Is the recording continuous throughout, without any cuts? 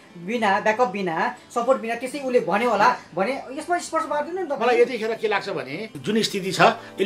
no; 1 cut; at 5.9 s

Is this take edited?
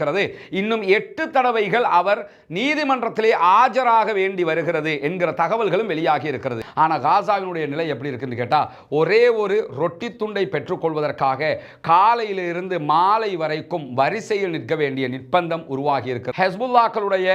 yes; 2 cuts; at 6.6 s, 16.3 s

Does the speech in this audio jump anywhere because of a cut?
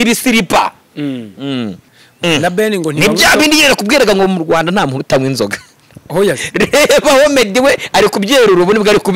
yes; 1 cut; at 1.8 s

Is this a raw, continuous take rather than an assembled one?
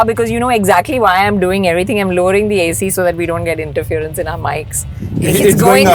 yes; 0 cuts

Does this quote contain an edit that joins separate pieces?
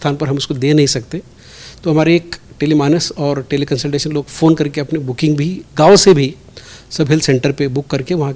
no; 0 cuts

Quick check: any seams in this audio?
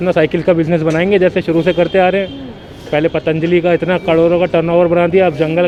no; 0 cuts

